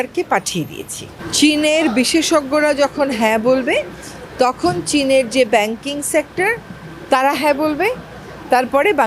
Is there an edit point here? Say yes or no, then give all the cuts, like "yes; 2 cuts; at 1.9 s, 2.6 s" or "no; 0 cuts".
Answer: yes; 1 cut; at 1.2 s